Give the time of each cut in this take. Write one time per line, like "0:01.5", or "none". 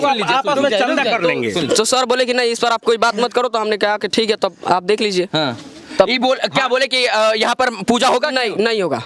none